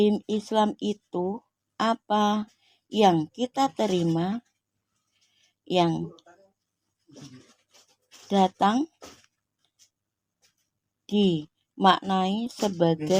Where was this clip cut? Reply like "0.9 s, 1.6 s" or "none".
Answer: none